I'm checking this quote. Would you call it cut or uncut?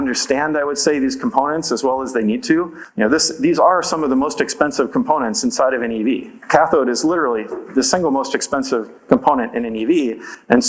uncut